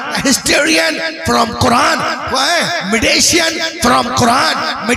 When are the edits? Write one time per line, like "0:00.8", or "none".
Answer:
none